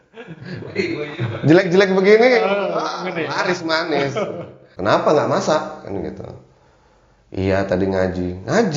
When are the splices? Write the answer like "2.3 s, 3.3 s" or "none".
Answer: 4.6 s